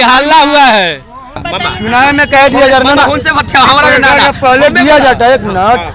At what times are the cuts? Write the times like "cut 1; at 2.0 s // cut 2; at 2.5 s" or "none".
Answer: cut 1; at 1.5 s